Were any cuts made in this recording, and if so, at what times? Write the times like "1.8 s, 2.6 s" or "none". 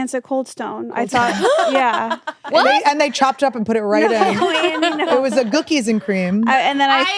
none